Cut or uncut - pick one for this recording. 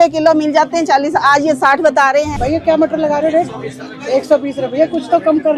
cut